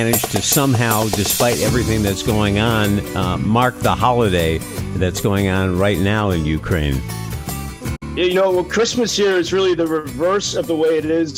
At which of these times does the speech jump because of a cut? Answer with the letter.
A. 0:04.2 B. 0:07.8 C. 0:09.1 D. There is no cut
D